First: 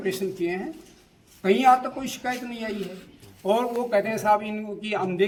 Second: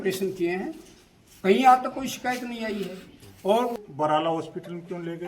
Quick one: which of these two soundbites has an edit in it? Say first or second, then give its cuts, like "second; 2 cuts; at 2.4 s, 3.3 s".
second; 1 cut; at 3.7 s